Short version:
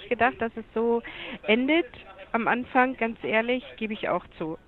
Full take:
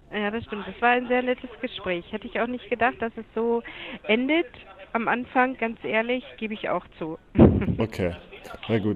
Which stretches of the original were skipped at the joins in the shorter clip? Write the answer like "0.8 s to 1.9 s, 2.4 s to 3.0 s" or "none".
none